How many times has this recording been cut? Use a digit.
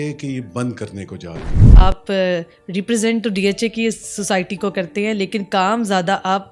1